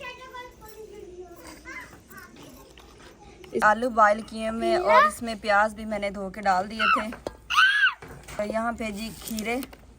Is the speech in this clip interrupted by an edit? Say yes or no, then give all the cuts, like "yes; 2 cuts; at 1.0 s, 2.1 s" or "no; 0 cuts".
yes; 2 cuts; at 3.6 s, 8.4 s